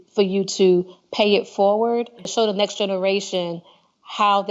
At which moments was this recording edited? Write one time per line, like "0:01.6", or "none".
0:02.3